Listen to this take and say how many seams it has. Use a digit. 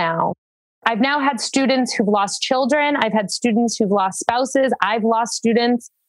0